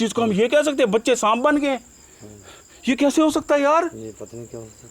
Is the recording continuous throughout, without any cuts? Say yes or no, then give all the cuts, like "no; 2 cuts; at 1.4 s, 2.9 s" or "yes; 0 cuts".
yes; 0 cuts